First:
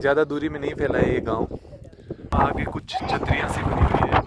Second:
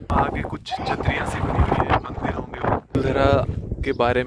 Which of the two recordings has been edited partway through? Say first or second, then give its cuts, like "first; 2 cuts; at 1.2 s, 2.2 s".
second; 1 cut; at 3.0 s